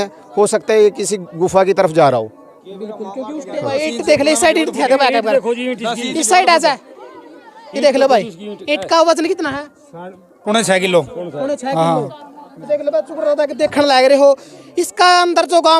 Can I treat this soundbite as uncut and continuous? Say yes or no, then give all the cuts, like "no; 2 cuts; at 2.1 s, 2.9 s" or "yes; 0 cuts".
no; 1 cut; at 3.6 s